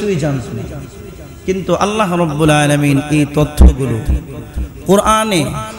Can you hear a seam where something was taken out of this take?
no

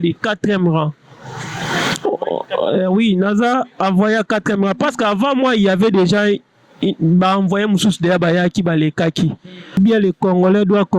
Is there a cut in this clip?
yes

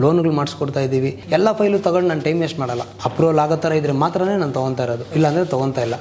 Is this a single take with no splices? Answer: no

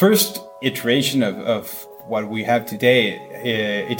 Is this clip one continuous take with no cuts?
no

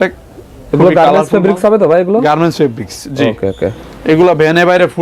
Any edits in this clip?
no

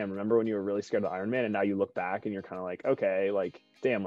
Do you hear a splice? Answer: no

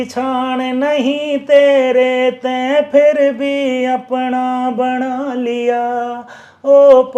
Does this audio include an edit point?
no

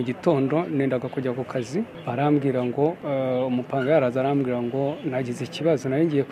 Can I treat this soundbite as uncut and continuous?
no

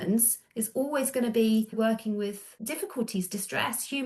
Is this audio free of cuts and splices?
no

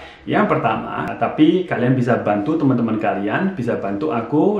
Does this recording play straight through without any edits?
no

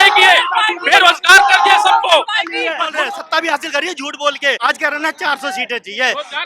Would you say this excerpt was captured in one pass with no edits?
no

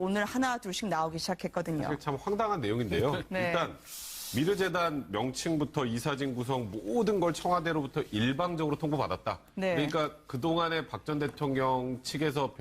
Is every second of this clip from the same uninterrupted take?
no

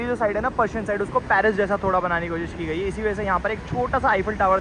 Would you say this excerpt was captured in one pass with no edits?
yes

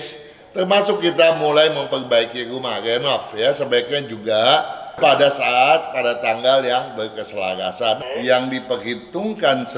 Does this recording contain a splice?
yes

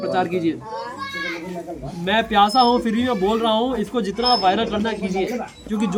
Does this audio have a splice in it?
no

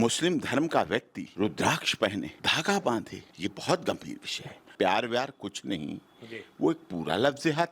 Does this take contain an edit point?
yes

